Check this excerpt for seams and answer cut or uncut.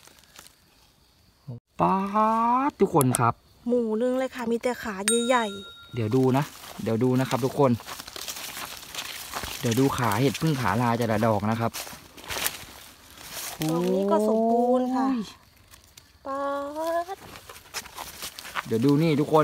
cut